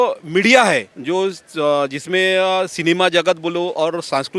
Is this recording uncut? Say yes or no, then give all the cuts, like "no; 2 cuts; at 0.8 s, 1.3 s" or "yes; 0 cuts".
no; 1 cut; at 0.9 s